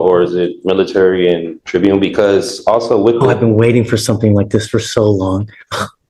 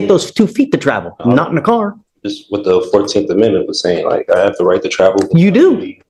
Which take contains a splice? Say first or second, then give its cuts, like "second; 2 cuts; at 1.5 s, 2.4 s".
first; 1 cut; at 1.6 s